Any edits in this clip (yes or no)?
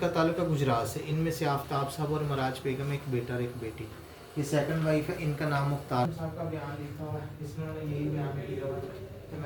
yes